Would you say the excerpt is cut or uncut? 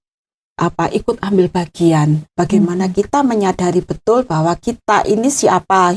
cut